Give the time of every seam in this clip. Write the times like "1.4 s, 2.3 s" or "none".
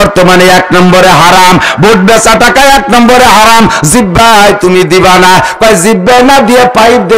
none